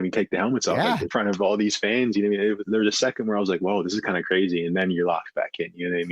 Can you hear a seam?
yes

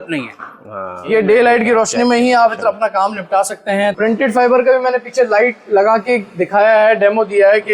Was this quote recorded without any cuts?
no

